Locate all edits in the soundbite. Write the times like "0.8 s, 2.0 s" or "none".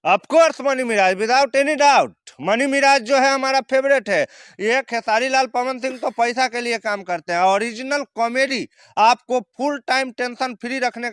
4.5 s